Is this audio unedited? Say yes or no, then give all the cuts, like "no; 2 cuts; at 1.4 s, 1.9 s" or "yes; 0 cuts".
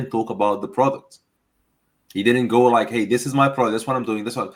yes; 0 cuts